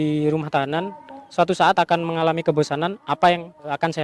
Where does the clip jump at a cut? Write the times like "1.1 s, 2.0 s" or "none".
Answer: none